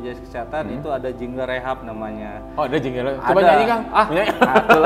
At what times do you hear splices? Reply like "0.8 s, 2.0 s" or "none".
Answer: none

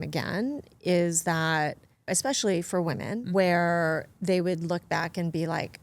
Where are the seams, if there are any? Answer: 2.1 s, 3.2 s

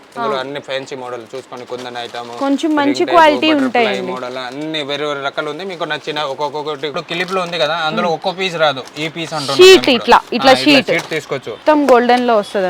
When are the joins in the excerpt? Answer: 6.9 s, 11.5 s

